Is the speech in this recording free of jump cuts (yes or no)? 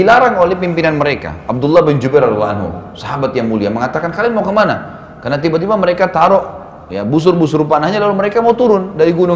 yes